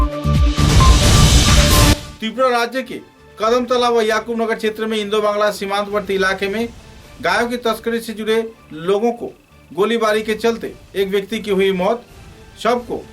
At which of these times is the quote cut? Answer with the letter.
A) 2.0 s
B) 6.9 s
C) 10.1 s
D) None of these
A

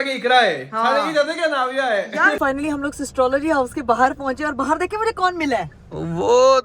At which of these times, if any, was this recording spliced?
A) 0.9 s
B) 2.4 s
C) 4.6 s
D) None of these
B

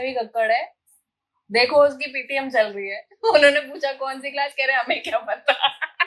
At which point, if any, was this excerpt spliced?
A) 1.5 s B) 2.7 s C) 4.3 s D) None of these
D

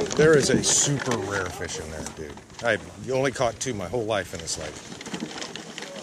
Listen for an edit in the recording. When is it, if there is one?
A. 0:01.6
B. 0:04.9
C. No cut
C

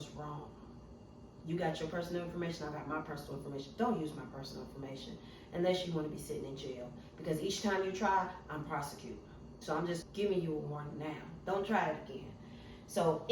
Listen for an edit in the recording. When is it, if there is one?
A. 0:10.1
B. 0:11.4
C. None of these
A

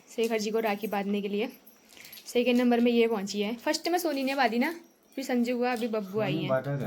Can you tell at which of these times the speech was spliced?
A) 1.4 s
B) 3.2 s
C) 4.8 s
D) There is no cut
D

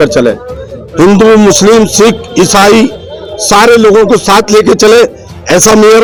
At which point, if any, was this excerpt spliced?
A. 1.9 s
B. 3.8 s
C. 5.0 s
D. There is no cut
D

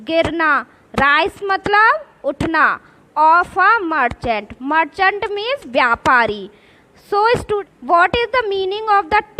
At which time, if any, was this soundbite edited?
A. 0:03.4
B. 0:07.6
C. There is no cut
B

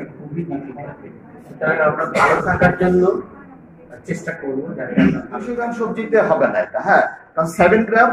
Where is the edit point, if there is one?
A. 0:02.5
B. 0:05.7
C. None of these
B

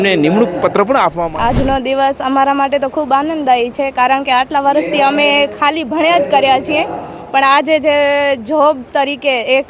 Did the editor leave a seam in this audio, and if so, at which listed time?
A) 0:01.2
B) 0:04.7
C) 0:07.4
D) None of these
A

